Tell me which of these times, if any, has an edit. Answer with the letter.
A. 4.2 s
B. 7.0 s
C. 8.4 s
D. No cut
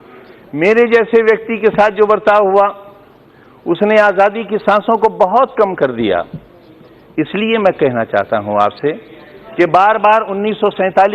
D